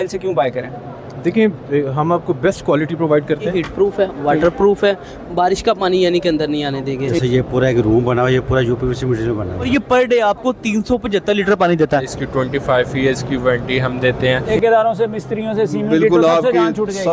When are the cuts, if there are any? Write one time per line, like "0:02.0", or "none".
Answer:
0:03.5
0:07.2
0:09.7
0:12.1
0:14.5